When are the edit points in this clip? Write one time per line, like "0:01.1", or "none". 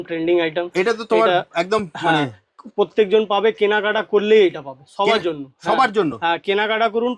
none